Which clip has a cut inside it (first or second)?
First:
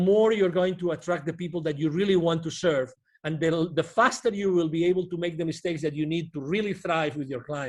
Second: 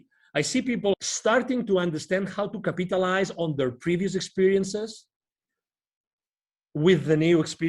second